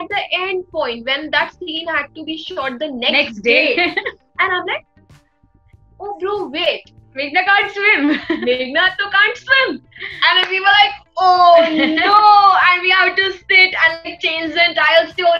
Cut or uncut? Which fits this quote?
uncut